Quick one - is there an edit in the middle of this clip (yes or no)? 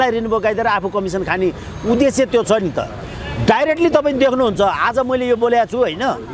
no